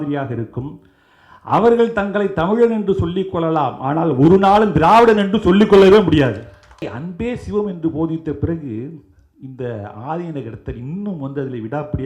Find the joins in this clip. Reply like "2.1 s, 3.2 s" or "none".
7.0 s

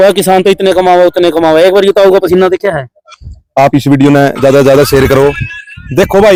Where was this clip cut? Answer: none

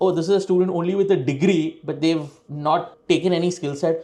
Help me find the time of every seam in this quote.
none

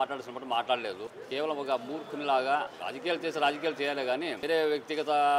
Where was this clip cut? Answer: 1.2 s, 2.8 s, 4.4 s

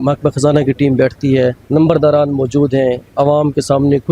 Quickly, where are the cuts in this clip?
1.6 s

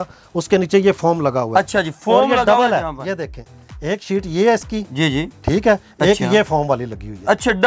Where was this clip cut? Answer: none

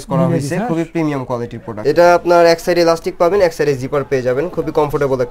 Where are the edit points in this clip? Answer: 1.7 s

